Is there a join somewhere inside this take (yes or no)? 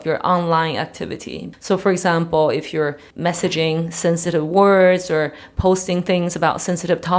yes